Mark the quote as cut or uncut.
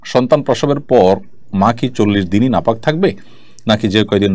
uncut